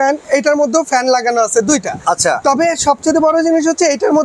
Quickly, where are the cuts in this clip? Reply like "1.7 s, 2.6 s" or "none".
none